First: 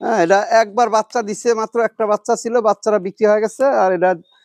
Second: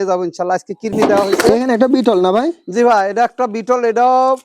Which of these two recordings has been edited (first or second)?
second